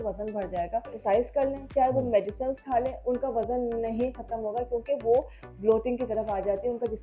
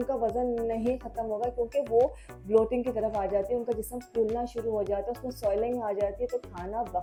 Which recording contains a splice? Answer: first; 1 cut; at 1.0 s

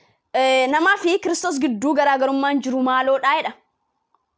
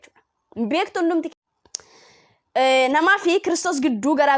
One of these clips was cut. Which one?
second; 1 cut; at 1.3 s

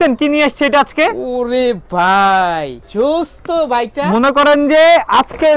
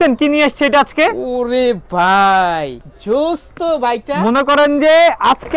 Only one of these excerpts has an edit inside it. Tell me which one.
first; 1 cut; at 2.8 s

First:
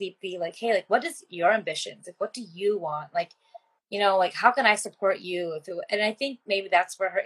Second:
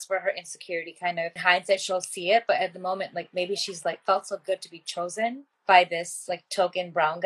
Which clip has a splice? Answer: second; 2 cuts; at 1.4 s, 5.5 s

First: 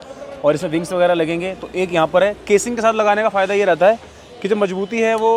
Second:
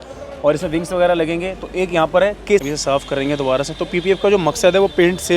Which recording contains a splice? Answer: second; 1 cut; at 2.6 s

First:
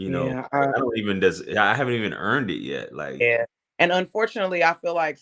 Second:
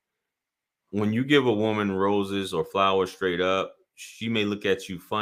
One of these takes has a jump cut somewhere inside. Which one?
first; 1 cut; at 3.2 s

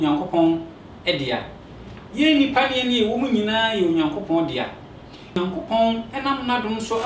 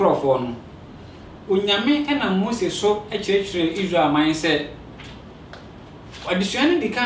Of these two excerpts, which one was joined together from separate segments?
first; 1 cut; at 5.4 s

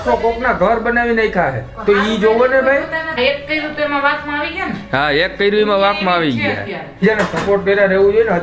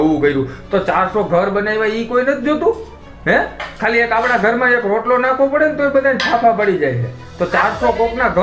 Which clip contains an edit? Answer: first; 2 cuts; at 3.1 s, 7.0 s

